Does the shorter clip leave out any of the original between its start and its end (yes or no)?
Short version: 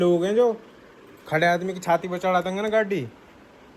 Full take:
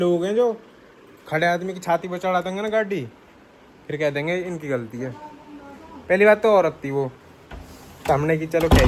no